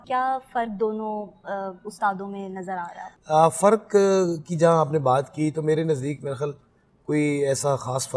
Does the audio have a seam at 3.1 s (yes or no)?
yes